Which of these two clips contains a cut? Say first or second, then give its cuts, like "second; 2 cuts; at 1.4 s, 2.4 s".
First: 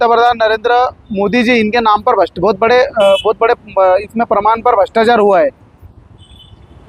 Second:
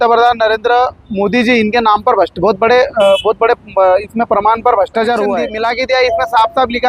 second; 1 cut; at 5.5 s